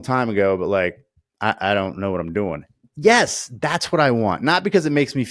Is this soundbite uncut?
yes; 0 cuts

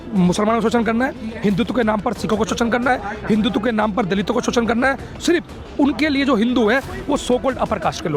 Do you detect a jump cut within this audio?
no; 0 cuts

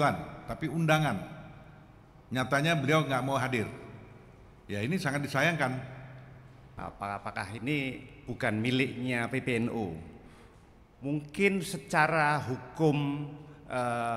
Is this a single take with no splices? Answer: no; 1 cut; at 6.8 s

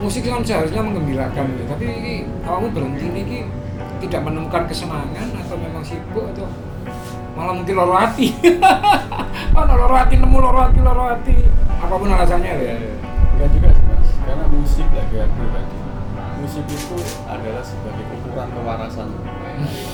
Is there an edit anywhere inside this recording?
no; 0 cuts

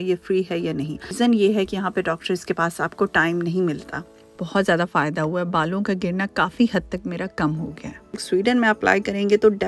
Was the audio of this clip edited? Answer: yes; 3 cuts; at 1.1 s, 4.1 s, 8.2 s

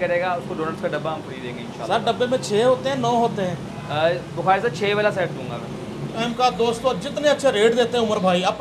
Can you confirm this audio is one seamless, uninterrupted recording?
no; 1 cut; at 6.2 s

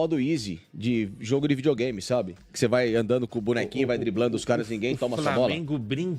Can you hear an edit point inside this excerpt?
no; 0 cuts

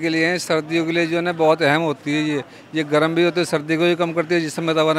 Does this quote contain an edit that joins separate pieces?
no; 0 cuts

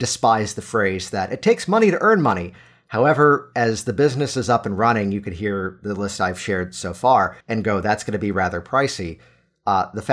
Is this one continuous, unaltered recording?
no; 1 cut; at 7.4 s

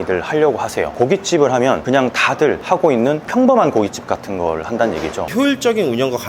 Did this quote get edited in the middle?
yes; 2 cuts; at 0.9 s, 5.3 s

